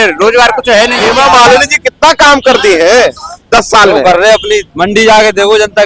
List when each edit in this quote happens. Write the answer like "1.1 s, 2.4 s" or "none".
1.0 s, 4.7 s

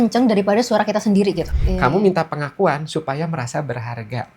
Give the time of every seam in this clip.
1.5 s

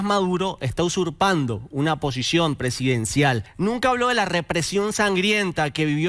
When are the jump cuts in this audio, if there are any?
3.5 s

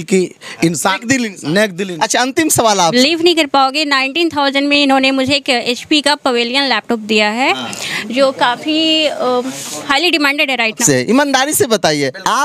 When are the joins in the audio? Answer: 2.9 s, 10.8 s

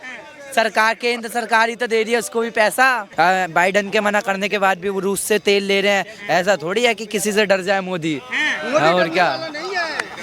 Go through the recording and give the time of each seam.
3.1 s

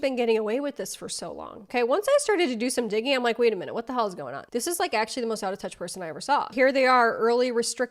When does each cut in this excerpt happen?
6.5 s

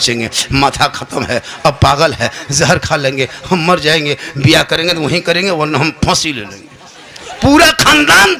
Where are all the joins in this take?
none

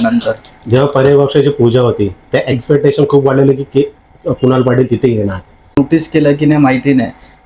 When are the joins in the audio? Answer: 5.8 s

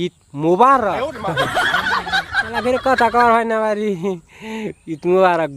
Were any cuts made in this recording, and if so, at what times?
none

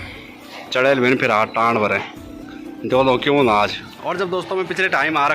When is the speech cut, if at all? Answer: 3.9 s

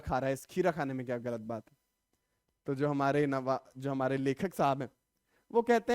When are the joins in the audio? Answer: none

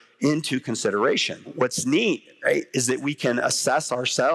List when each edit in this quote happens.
1.5 s

